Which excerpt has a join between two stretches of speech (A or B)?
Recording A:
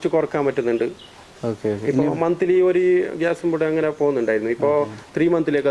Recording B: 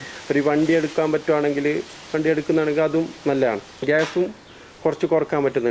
B